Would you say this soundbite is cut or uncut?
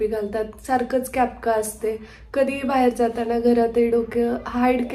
uncut